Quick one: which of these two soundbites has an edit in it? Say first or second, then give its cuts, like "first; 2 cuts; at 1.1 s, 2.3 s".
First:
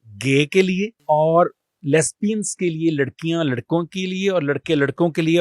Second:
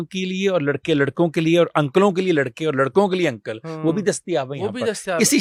first; 1 cut; at 1.0 s